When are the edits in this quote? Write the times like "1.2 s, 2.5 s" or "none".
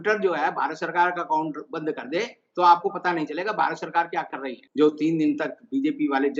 4.6 s